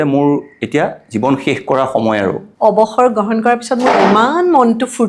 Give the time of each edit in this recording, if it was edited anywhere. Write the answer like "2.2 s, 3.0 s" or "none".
2.5 s